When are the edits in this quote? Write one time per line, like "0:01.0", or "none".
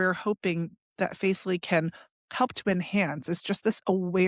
none